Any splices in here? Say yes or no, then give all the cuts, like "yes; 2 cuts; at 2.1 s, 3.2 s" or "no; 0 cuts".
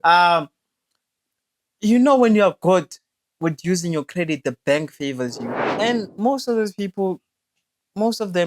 yes; 1 cut; at 5.7 s